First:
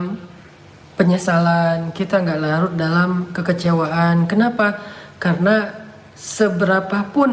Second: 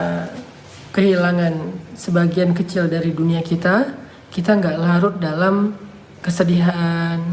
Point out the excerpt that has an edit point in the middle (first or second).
second